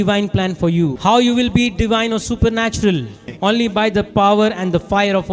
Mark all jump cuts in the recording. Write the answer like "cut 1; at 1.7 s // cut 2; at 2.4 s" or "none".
cut 1; at 0.9 s // cut 2; at 3.3 s